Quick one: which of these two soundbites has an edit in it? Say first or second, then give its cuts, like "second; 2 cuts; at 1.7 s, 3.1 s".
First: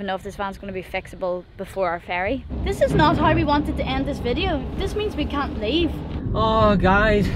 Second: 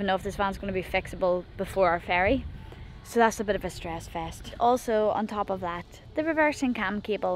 first; 2 cuts; at 2.5 s, 6.2 s